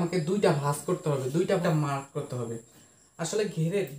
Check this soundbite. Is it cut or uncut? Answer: cut